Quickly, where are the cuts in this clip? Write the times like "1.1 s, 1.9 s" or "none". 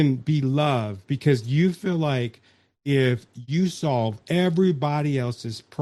none